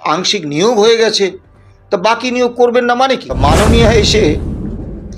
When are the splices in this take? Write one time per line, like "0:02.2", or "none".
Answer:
0:03.3